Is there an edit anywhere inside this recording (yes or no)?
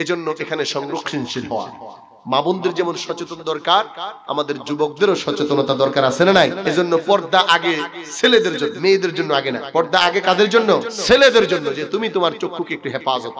yes